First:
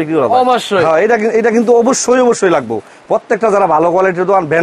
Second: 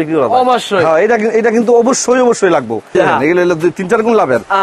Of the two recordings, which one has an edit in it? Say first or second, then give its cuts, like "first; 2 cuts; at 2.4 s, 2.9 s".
second; 1 cut; at 2.9 s